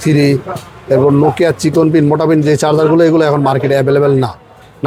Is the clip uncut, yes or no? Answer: yes